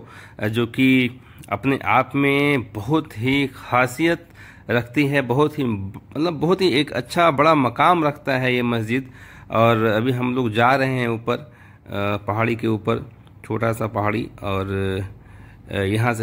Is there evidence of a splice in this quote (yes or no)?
no